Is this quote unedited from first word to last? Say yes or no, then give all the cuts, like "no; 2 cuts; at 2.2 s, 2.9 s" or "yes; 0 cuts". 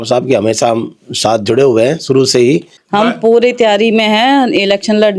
no; 1 cut; at 2.8 s